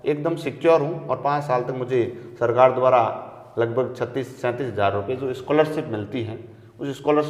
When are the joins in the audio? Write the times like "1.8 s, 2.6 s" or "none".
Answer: none